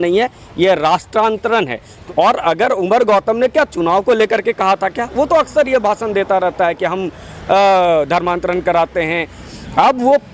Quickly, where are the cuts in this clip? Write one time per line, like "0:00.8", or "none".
0:01.9
0:09.4